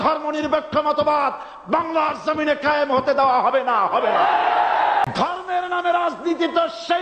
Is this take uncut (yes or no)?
no